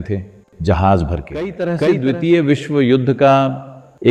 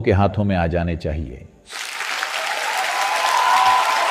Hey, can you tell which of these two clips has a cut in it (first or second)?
first